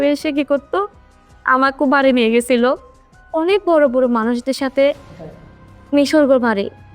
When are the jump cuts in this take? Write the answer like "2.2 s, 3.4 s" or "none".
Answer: none